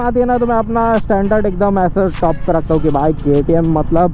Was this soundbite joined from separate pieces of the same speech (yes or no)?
no